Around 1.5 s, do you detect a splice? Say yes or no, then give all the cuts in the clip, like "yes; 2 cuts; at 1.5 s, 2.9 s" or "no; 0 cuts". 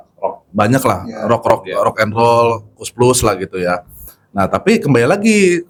no; 0 cuts